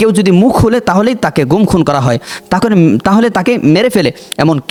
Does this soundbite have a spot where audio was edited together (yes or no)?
no